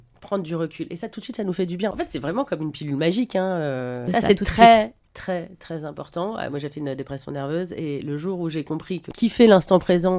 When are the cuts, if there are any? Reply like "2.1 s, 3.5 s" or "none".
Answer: 1.9 s, 4.0 s, 9.1 s